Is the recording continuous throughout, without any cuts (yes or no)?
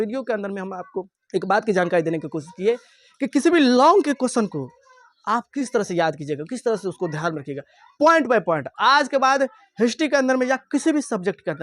no